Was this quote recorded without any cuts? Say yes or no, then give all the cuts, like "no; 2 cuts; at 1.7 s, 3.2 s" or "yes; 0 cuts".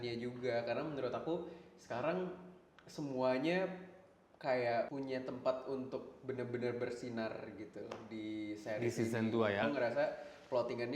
no; 2 cuts; at 4.9 s, 9.6 s